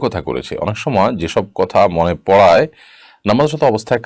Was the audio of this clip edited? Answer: no; 0 cuts

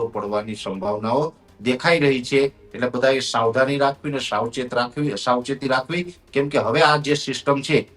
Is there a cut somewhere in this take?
no; 0 cuts

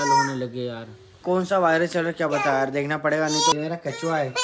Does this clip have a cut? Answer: yes; 2 cuts; at 1.1 s, 3.5 s

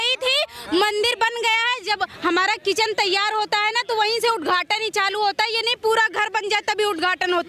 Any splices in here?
no; 0 cuts

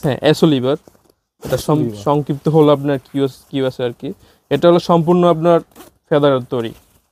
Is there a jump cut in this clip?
no; 0 cuts

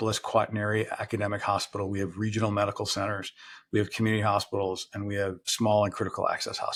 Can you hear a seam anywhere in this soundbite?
no; 0 cuts

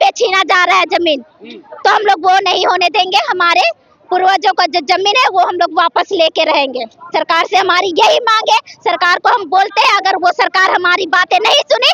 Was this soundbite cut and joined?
no; 0 cuts

